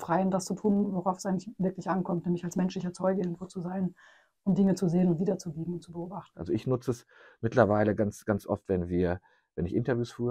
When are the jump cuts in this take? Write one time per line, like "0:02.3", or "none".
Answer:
0:06.3